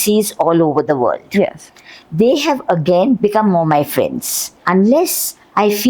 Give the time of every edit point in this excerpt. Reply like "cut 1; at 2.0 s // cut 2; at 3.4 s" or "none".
cut 1; at 3.2 s // cut 2; at 4.6 s